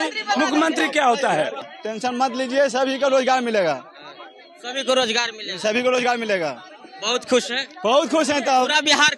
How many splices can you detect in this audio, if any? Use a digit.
1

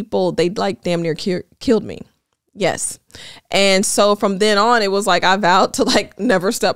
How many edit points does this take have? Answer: 0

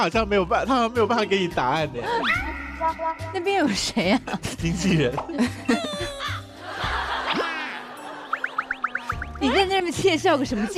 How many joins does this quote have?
0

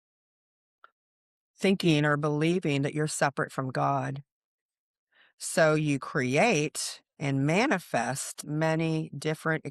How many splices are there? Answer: 1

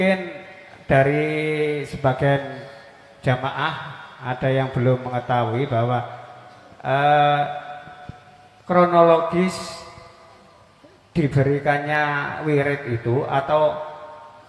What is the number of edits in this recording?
0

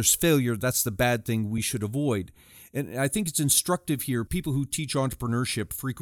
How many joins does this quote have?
2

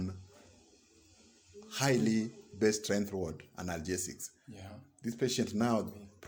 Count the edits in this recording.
0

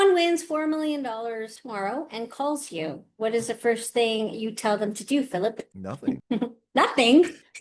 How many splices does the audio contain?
0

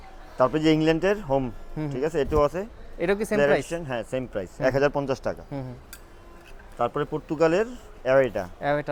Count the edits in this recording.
0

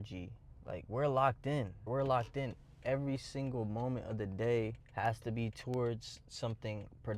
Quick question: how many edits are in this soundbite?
1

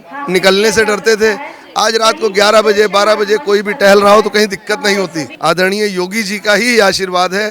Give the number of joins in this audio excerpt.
1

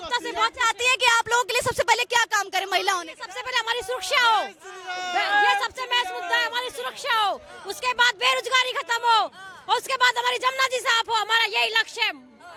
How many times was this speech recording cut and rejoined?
0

